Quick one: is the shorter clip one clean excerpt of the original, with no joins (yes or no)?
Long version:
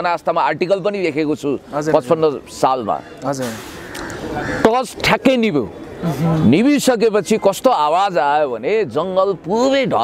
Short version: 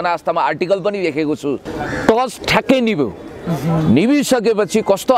no